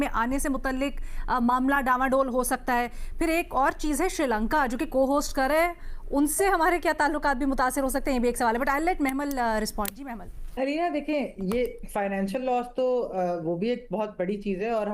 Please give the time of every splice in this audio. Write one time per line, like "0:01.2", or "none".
none